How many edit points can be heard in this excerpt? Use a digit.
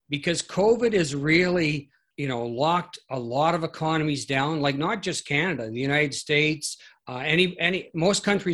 1